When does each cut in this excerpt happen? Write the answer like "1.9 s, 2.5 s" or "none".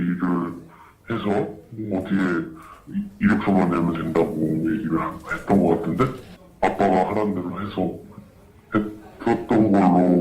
8.4 s